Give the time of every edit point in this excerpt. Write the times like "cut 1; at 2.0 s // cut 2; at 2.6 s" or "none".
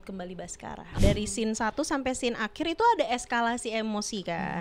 cut 1; at 1.0 s

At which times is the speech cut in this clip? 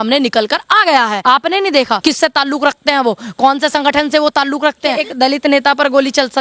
cut 1; at 1.2 s // cut 2; at 2.0 s // cut 3; at 5.0 s

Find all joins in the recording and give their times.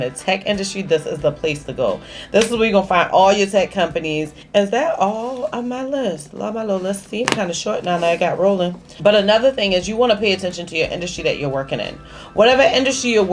cut 1; at 4.3 s // cut 2; at 8.9 s

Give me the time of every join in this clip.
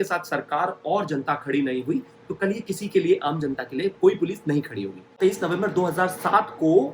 cut 1; at 5.1 s

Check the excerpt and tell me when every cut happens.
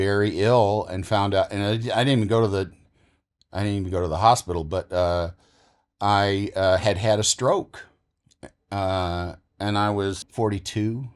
cut 1; at 10.2 s

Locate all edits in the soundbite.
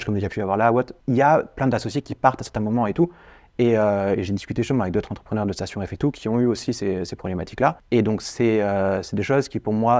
cut 1; at 1.0 s // cut 2; at 7.8 s

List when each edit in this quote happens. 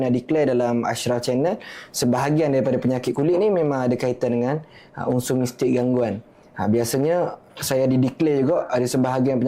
none

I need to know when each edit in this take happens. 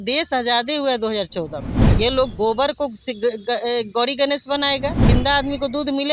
cut 1; at 1.9 s // cut 2; at 5.1 s

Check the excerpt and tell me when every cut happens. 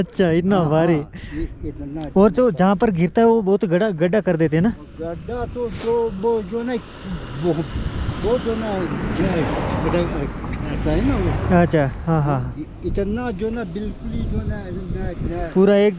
none

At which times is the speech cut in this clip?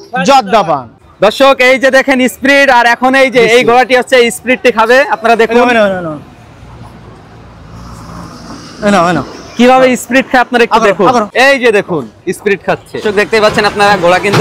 cut 1; at 1.1 s // cut 2; at 11.3 s // cut 3; at 13.0 s

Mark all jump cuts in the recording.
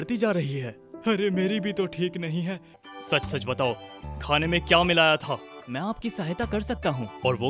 cut 1; at 2.7 s // cut 2; at 5.5 s

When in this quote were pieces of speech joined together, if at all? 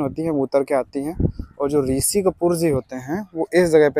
none

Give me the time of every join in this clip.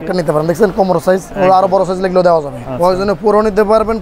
cut 1; at 1.3 s // cut 2; at 2.6 s

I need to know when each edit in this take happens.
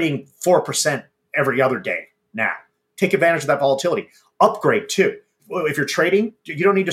cut 1; at 5.4 s

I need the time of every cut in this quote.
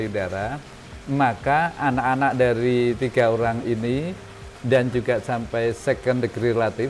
none

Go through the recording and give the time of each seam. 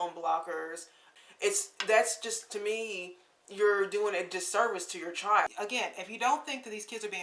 cut 1; at 1.0 s // cut 2; at 5.5 s

